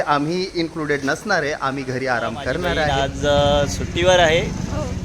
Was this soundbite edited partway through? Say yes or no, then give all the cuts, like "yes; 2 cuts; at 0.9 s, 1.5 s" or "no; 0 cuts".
yes; 1 cut; at 2.9 s